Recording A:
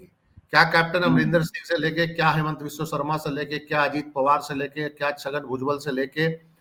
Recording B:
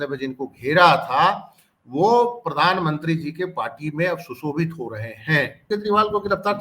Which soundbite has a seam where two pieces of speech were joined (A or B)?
B